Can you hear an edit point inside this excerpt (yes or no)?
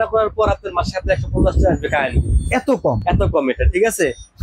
no